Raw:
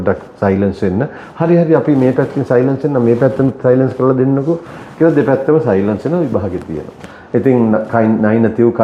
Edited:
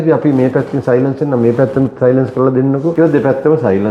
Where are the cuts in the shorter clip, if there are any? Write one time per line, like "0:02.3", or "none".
0:02.9